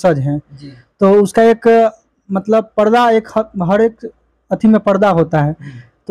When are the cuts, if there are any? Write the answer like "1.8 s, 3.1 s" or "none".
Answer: none